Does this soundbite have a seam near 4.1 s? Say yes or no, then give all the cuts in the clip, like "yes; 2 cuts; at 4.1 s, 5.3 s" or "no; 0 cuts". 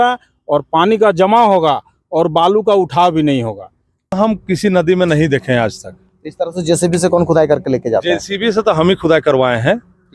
yes; 1 cut; at 4.1 s